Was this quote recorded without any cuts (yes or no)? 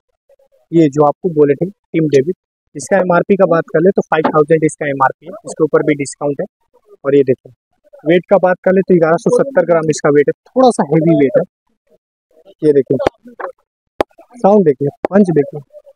yes